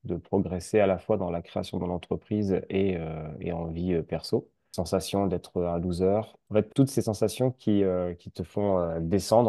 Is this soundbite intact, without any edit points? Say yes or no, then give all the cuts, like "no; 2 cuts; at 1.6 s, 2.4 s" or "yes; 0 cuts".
no; 2 cuts; at 4.6 s, 6.4 s